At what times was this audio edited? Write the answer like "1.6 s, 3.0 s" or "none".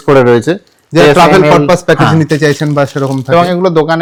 none